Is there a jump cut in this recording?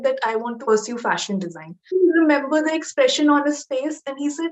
yes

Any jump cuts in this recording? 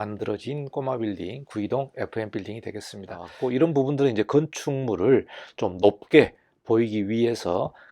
yes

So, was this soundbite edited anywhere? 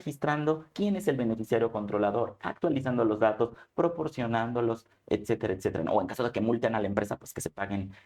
no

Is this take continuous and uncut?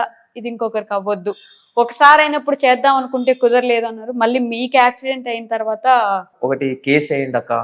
no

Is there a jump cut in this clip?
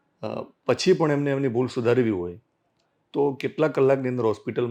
no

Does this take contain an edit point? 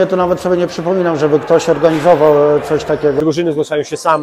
yes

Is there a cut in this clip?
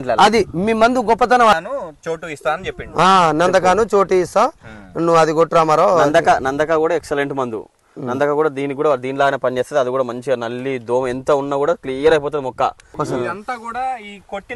yes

